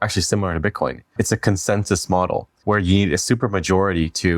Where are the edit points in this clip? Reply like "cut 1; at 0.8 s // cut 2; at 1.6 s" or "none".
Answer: cut 1; at 1.1 s // cut 2; at 2.6 s